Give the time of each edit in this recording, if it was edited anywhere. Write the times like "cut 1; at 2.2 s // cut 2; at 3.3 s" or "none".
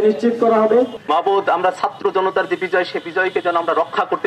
cut 1; at 1.0 s

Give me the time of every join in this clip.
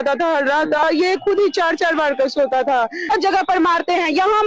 cut 1; at 0.8 s // cut 2; at 3.1 s

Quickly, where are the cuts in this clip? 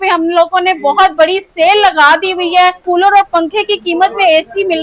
cut 1; at 2.8 s

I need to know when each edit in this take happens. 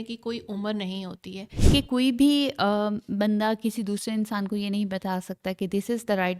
cut 1; at 1.6 s

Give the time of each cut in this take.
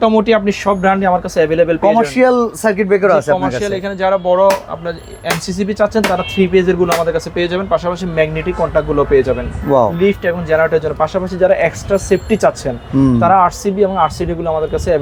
none

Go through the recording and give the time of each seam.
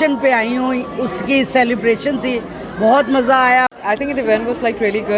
cut 1; at 3.7 s

